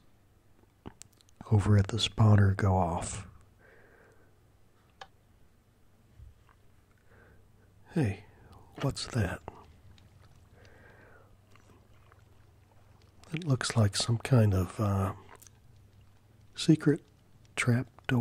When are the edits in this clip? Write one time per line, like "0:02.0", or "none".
0:07.1